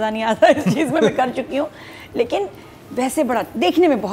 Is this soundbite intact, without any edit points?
yes; 0 cuts

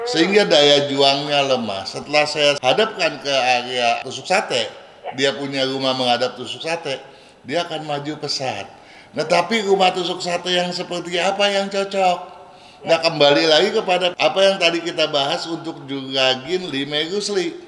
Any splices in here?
no; 0 cuts

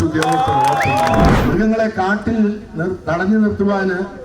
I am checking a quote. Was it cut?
yes; 1 cut; at 1.3 s

